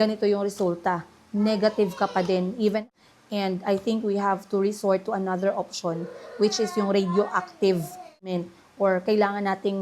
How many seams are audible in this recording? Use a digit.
2